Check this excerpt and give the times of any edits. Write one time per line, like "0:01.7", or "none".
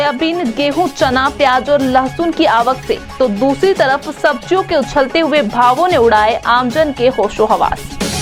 none